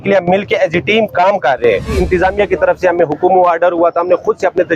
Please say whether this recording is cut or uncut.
cut